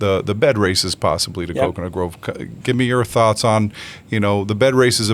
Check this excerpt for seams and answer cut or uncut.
uncut